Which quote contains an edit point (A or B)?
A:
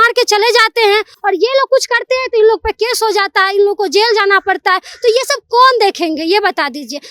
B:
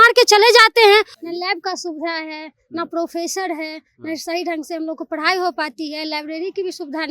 B